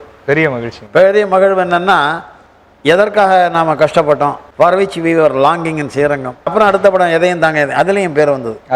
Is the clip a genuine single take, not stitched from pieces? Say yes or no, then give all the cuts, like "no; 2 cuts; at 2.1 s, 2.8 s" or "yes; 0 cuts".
no; 2 cuts; at 4.4 s, 6.5 s